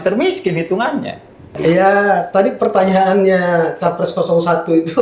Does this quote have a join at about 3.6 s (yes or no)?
no